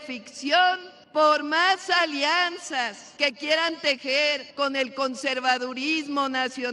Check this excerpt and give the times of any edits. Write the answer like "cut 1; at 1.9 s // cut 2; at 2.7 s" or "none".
cut 1; at 0.9 s // cut 2; at 3.0 s // cut 3; at 4.5 s